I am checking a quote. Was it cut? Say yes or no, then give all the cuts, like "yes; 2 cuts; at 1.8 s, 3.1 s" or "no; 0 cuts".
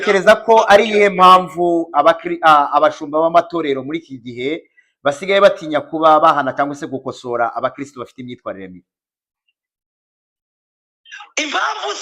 no; 0 cuts